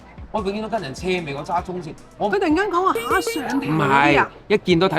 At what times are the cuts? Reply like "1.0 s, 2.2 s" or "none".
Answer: 2.3 s